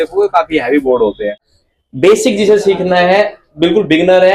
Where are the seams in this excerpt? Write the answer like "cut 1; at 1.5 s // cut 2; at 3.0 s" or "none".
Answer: cut 1; at 1.5 s

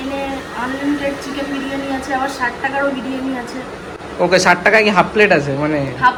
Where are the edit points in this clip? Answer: none

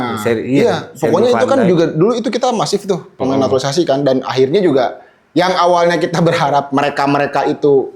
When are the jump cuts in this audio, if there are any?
none

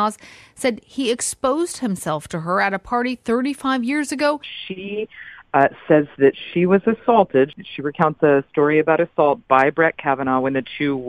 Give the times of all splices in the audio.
cut 1; at 4.5 s // cut 2; at 7.5 s

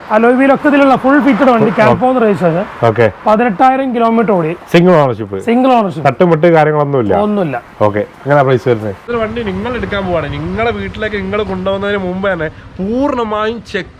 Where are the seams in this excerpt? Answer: cut 1; at 9.1 s

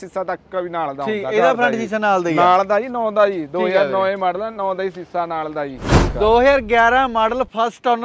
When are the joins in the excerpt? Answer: cut 1; at 5.9 s

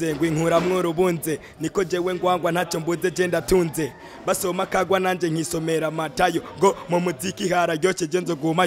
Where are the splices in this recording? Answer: none

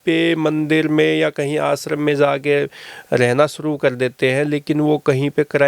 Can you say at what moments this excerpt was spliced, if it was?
none

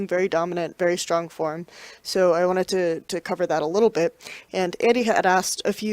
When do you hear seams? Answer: cut 1; at 2.0 s

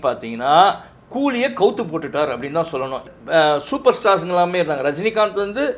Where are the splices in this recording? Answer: cut 1; at 3.1 s

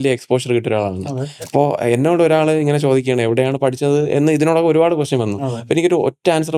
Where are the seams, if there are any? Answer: cut 1; at 1.4 s

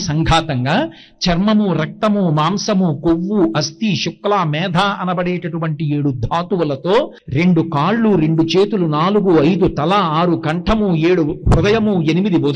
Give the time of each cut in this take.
cut 1; at 7.2 s

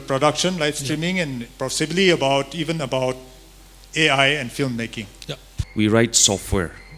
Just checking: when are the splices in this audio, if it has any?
cut 1; at 5.7 s

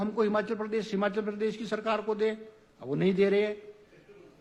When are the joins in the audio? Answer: none

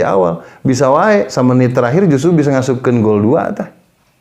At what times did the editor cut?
cut 1; at 1.3 s

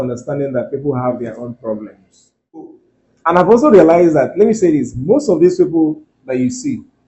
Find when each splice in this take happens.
cut 1; at 2.6 s

